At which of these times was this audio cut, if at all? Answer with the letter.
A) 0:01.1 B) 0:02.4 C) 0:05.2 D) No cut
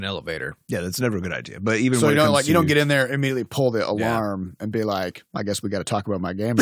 C